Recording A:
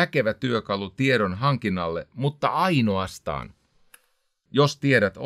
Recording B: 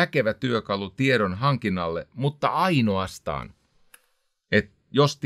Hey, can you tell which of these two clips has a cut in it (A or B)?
A